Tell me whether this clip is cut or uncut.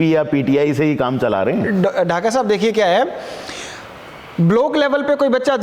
uncut